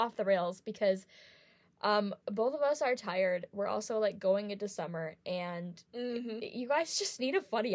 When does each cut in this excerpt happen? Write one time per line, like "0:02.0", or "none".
none